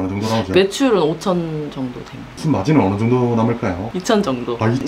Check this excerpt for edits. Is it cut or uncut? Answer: uncut